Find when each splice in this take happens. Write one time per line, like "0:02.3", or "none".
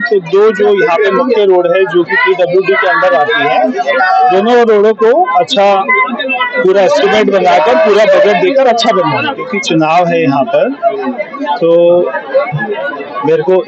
0:09.5